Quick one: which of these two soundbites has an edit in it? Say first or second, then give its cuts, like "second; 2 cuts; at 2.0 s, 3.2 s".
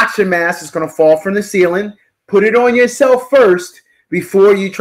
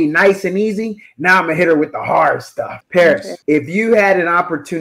second; 2 cuts; at 2.8 s, 3.3 s